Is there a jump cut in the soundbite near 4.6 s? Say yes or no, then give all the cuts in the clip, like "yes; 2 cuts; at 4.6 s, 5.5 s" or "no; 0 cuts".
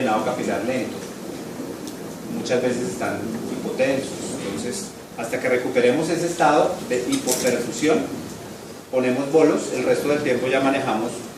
yes; 1 cut; at 4.6 s